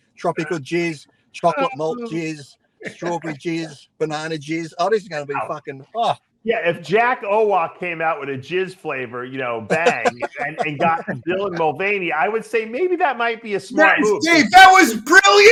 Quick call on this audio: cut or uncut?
uncut